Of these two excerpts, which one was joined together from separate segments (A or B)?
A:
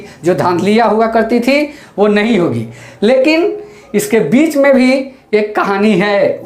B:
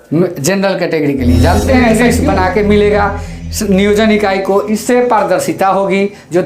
B